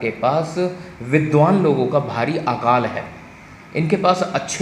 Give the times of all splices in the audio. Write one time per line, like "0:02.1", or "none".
none